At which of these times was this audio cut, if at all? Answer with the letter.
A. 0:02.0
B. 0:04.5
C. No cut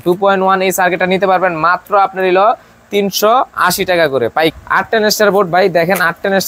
B